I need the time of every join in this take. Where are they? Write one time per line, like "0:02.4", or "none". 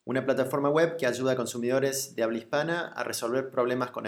0:02.0
0:02.9